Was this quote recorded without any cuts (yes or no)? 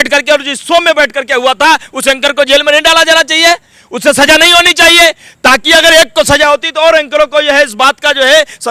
yes